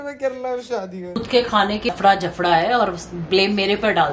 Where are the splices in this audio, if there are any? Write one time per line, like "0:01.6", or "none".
0:01.1
0:01.9